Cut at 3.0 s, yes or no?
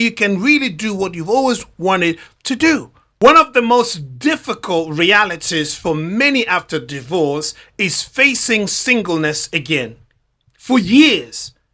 yes